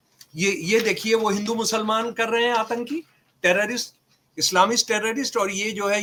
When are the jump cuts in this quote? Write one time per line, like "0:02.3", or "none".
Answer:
none